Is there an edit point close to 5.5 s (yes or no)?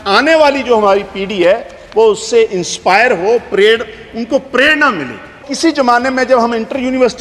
yes